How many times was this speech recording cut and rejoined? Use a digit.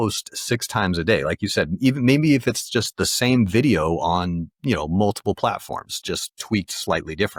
0